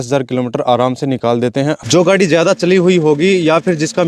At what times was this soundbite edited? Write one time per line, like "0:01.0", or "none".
0:01.8